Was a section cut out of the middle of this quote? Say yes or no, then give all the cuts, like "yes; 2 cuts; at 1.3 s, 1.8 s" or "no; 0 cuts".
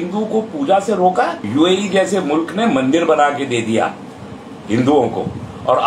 yes; 1 cut; at 1.4 s